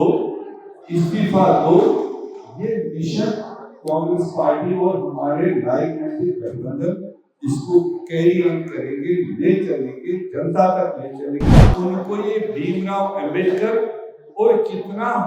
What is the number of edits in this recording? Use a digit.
1